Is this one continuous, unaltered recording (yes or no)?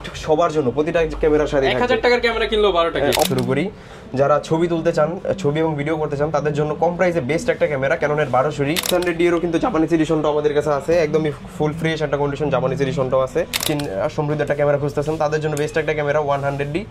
no